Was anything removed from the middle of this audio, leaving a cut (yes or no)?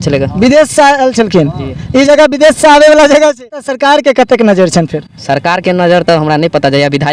yes